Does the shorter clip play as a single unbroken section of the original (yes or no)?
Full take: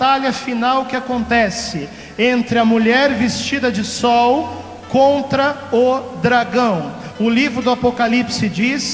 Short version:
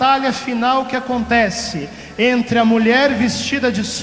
yes